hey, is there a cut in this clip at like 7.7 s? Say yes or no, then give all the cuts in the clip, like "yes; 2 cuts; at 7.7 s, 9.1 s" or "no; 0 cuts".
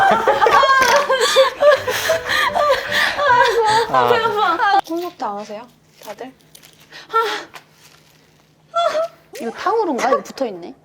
no; 2 cuts; at 4.8 s, 9.3 s